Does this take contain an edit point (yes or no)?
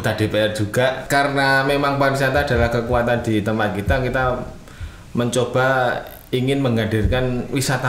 yes